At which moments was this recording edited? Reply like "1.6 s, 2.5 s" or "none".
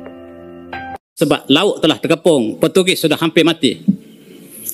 1.0 s